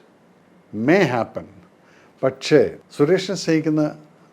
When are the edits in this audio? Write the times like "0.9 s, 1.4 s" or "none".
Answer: 2.8 s